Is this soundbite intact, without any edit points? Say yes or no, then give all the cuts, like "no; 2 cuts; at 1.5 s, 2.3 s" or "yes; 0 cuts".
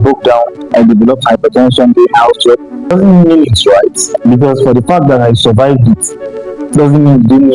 no; 1 cut; at 2.9 s